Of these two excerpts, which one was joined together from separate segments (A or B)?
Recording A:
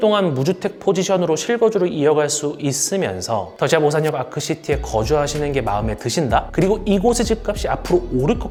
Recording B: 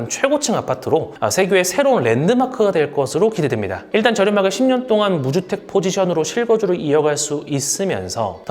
B